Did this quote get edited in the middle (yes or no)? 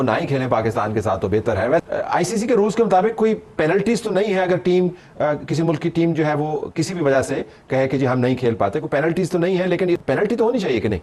no